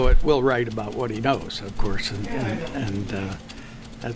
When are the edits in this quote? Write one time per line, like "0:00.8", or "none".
none